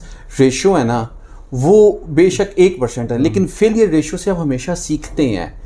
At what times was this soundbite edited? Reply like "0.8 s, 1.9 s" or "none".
none